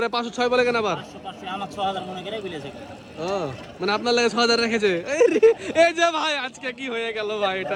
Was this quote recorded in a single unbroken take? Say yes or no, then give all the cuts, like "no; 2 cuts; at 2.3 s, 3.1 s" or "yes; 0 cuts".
yes; 0 cuts